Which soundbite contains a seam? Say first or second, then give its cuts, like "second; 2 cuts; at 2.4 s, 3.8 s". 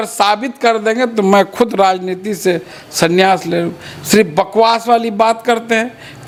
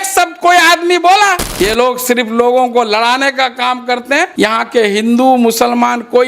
second; 2 cuts; at 1.4 s, 4.3 s